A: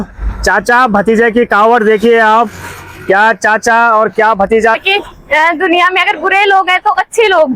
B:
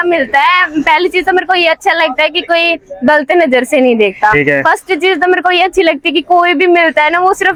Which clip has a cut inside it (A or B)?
A